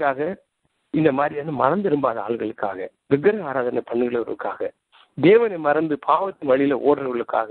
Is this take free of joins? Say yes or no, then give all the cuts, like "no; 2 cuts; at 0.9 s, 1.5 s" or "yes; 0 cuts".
yes; 0 cuts